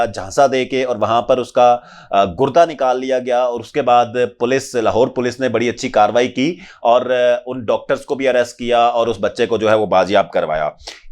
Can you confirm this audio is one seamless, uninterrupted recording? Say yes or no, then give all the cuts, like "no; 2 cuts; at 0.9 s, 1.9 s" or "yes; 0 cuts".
yes; 0 cuts